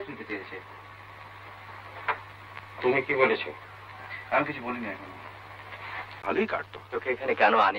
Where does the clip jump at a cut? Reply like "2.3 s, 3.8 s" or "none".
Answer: 6.2 s